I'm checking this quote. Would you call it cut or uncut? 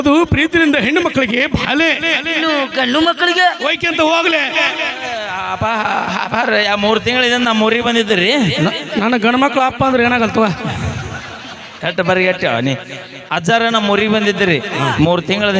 cut